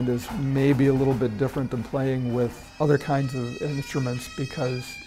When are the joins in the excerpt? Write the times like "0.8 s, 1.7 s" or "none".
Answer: 2.6 s